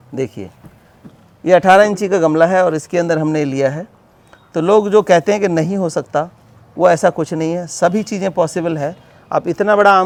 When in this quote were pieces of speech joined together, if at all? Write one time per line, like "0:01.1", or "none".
none